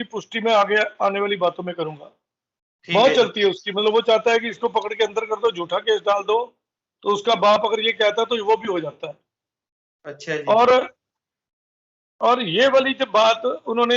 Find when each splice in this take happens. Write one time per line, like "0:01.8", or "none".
none

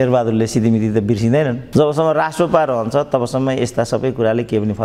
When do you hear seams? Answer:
0:01.6

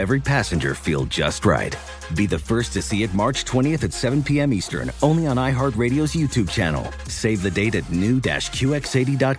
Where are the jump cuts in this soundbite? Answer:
none

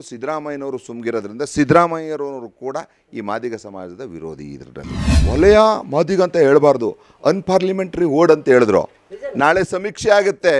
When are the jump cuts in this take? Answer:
0:05.2

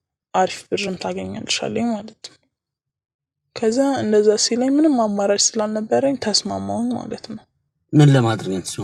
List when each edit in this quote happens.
none

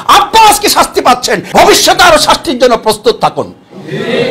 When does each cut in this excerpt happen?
0:01.4

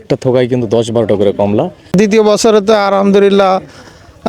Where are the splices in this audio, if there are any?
0:01.9

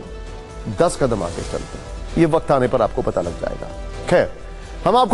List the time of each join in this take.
none

